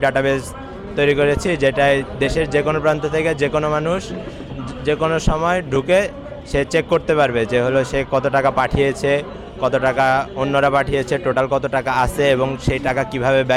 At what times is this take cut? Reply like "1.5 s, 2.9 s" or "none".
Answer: none